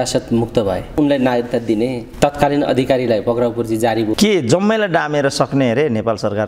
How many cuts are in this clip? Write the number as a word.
two